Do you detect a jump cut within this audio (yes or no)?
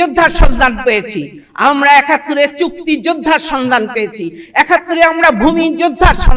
no